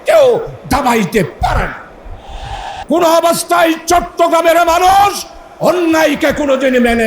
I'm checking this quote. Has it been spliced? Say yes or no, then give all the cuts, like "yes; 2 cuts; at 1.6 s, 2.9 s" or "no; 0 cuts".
yes; 1 cut; at 2.7 s